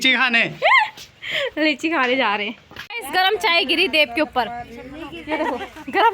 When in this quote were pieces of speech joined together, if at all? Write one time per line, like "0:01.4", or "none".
0:03.0